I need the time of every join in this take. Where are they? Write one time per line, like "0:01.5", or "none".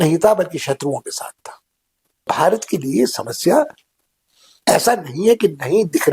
0:02.2

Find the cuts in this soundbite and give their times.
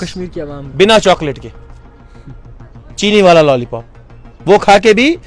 none

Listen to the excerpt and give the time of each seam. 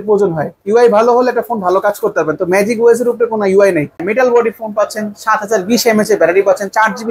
0:04.0

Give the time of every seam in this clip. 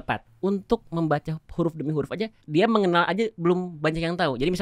0:00.7
0:02.4

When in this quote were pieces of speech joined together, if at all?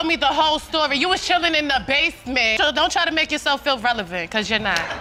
none

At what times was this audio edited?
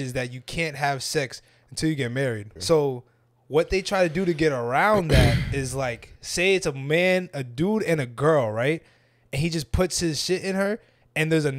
0:02.5
0:06.2

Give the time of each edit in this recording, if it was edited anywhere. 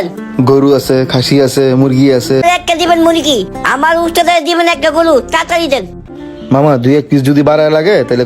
0:02.4
0:06.0

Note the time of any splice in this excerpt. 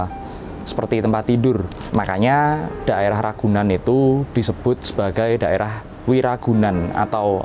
0:01.8

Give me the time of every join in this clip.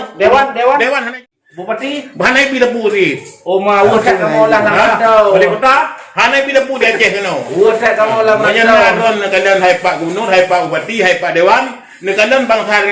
0:01.1

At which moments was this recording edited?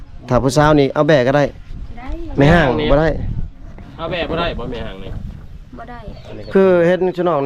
0:06.1

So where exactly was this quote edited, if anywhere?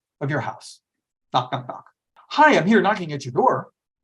0:02.2

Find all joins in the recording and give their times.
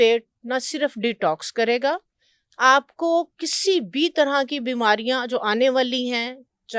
none

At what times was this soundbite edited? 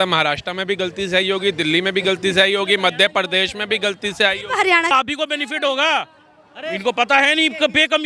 0:04.9

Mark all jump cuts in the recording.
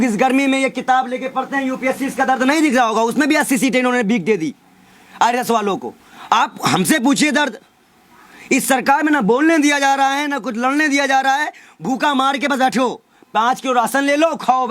none

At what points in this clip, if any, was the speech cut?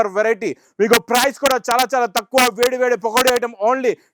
none

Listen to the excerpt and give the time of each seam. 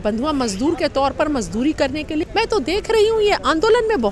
0:02.3

